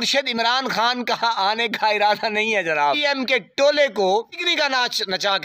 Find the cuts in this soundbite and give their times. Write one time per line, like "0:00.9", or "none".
0:03.0
0:04.4